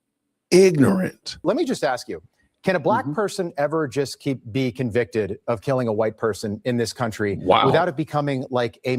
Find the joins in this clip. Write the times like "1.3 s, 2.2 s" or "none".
1.4 s